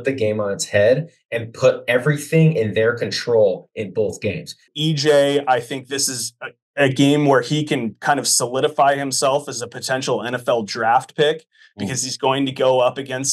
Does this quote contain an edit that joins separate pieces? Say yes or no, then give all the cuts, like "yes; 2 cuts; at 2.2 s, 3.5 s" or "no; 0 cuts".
yes; 1 cut; at 4.7 s